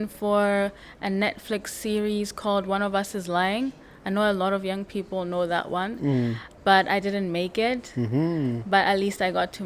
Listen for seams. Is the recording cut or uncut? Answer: uncut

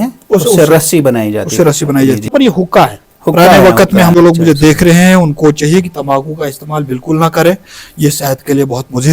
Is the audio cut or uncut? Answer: cut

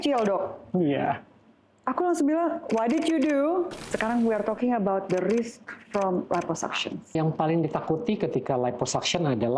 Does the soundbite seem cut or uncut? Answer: cut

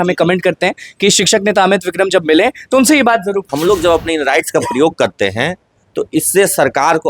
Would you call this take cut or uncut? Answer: cut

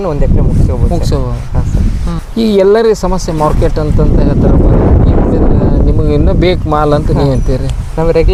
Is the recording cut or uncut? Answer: uncut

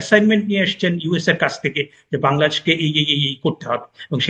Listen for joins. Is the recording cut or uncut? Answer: uncut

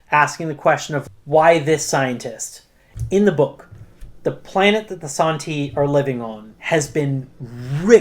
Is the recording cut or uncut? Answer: cut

